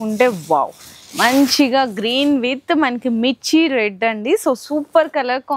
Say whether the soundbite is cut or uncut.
uncut